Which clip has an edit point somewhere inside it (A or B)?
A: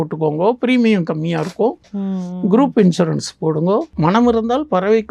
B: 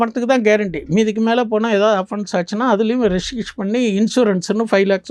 A